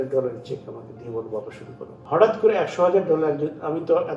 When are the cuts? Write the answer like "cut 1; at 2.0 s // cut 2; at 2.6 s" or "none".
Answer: cut 1; at 2.0 s